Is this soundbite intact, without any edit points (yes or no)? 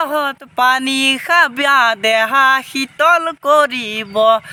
yes